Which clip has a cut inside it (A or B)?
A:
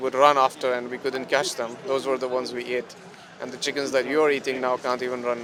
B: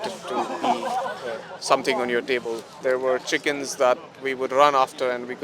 B